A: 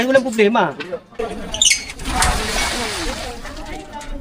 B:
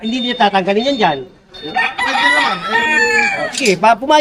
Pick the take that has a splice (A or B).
A